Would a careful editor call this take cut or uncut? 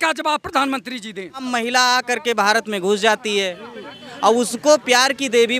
cut